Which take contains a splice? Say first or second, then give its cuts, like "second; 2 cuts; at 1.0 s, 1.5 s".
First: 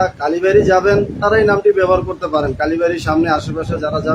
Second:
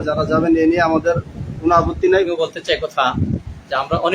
second; 1 cut; at 2.3 s